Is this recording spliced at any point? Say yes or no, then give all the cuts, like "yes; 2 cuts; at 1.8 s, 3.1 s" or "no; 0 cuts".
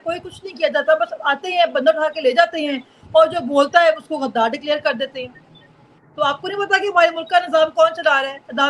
no; 0 cuts